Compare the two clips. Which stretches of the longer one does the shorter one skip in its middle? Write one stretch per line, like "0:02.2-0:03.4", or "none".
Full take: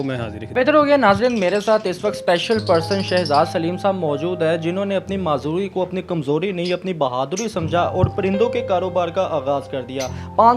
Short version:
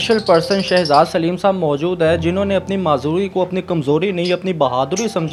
none